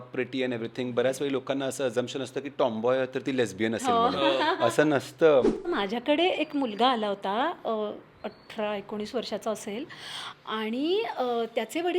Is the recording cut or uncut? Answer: cut